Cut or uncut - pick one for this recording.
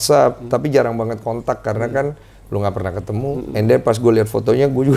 uncut